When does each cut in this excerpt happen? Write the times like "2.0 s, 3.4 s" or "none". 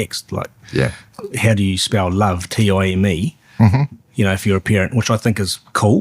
1.0 s